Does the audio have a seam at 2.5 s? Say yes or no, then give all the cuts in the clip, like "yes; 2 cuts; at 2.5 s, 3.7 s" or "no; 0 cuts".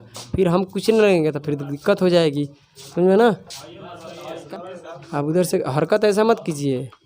no; 1 cut; at 4.3 s